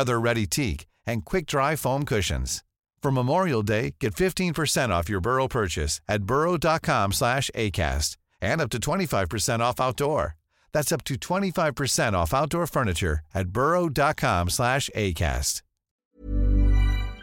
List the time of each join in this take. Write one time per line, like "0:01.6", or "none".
0:16.0